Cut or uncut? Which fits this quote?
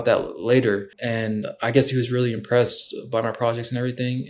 cut